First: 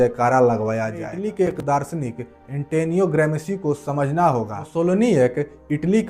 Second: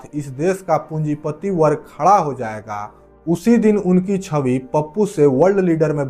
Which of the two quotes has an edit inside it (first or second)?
first